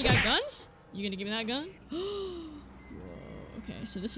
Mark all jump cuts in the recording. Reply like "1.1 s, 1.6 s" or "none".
1.8 s